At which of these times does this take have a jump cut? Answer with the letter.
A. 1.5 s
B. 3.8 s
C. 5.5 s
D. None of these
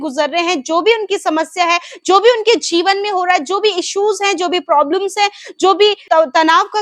D